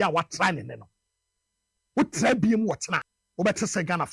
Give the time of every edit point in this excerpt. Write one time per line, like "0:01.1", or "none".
0:03.2